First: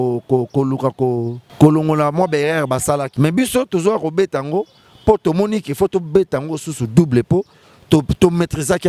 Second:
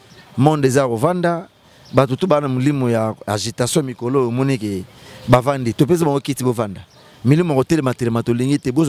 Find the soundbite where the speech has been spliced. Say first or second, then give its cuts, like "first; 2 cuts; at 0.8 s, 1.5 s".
first; 2 cuts; at 1.4 s, 3.1 s